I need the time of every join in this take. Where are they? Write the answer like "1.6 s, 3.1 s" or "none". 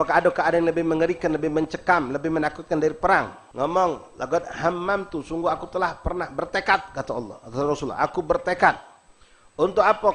3.4 s